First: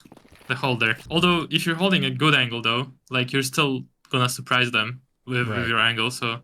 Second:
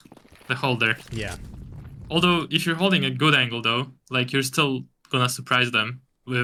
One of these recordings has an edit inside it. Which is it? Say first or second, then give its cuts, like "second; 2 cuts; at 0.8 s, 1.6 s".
first; 1 cut; at 1.0 s